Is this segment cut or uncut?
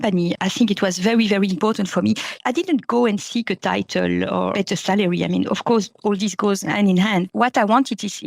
uncut